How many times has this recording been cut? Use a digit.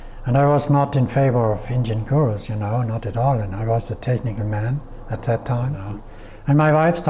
1